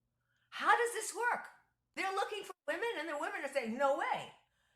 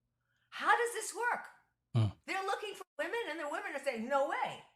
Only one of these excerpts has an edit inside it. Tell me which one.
first; 1 cut; at 1.8 s

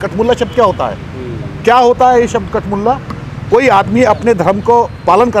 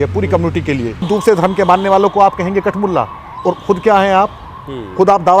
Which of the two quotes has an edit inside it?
second; 1 cut; at 1.1 s

